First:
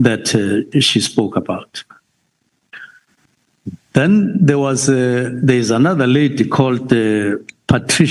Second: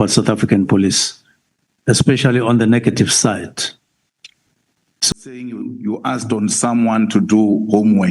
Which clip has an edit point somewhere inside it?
second; 1 cut; at 5.1 s

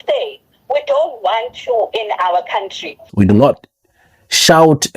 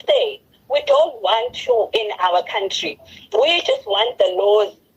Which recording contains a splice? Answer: first; 1 cut; at 3.0 s

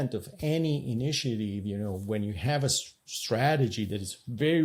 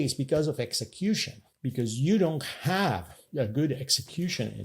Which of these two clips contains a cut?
second; 2 cuts; at 2.0 s, 3.2 s

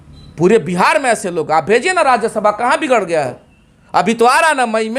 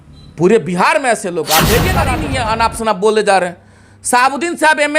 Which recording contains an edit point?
second; 1 cut; at 2.1 s

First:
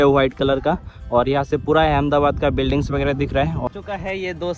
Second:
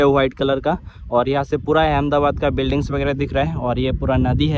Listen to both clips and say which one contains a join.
first; 1 cut; at 3.7 s

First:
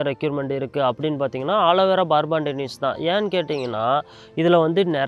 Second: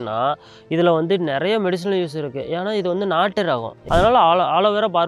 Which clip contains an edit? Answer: second; 1 cut; at 3.7 s

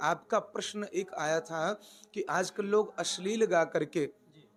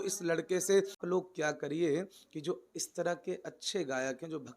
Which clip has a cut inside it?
second; 1 cut; at 1.0 s

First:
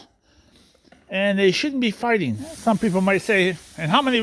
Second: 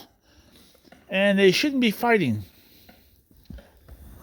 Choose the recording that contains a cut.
first; 1 cut; at 2.5 s

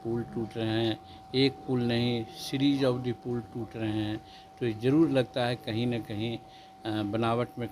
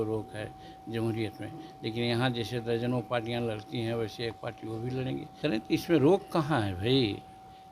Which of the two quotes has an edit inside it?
second; 1 cut; at 5.3 s

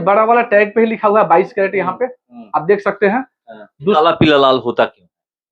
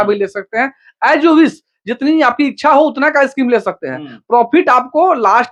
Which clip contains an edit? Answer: first; 1 cut; at 3.9 s

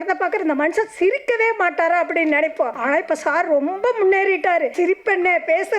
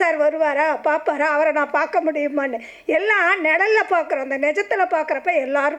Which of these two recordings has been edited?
first; 2 cuts; at 2.8 s, 4.7 s

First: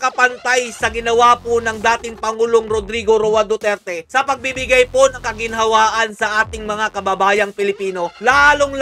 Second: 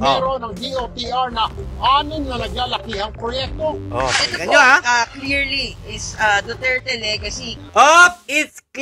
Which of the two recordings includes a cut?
second; 1 cut; at 7.5 s

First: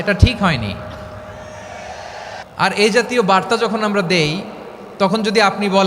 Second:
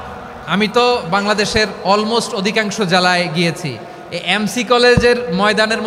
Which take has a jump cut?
first; 1 cut; at 2.4 s

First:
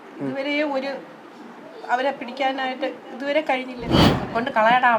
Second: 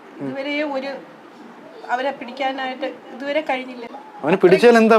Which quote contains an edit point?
first; 1 cut; at 3.9 s

